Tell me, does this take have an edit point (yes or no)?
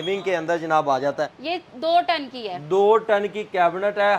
yes